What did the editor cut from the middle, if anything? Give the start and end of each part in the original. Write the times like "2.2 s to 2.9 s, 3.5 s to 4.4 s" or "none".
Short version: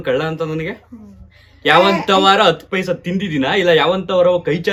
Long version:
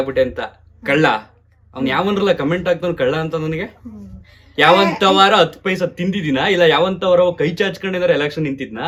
none